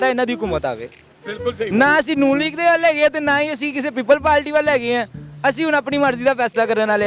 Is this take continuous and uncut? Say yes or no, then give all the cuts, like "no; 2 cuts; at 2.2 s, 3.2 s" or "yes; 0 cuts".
yes; 0 cuts